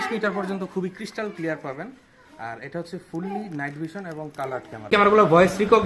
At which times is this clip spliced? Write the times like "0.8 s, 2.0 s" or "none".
4.9 s